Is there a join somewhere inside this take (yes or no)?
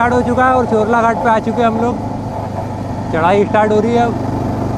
no